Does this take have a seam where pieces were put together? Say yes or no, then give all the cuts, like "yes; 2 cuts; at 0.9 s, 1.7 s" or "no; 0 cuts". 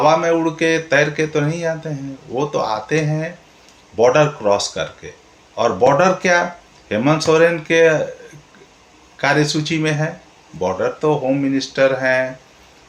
no; 0 cuts